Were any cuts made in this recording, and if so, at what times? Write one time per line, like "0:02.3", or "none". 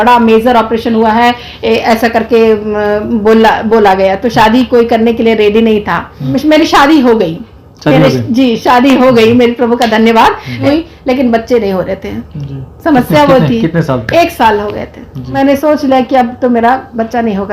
0:06.3
0:10.7
0:15.3